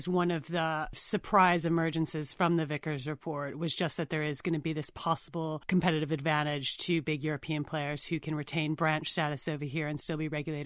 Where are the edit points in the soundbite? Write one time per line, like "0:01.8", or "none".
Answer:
0:01.0
0:05.6